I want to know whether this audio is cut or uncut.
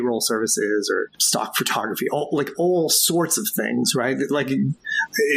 cut